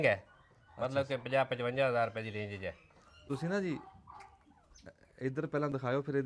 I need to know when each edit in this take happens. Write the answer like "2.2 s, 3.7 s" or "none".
3.2 s